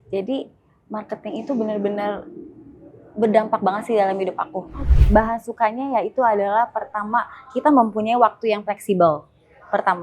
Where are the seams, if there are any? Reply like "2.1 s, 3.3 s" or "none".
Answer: 4.8 s